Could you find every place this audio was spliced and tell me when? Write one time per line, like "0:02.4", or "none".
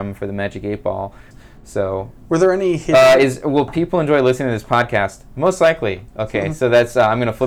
0:01.3